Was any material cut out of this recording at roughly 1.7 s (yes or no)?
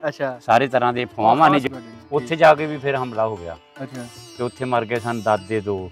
yes